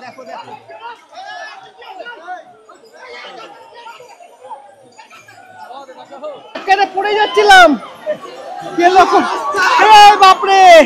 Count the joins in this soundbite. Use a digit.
1